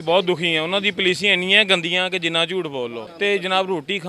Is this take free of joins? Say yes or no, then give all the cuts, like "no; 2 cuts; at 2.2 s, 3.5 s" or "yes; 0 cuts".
no; 1 cut; at 3.0 s